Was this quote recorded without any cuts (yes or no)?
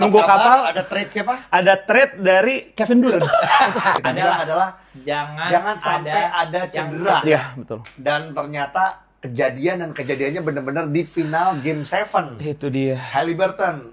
no